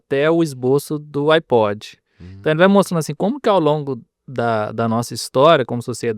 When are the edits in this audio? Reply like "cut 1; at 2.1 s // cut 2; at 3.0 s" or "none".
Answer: none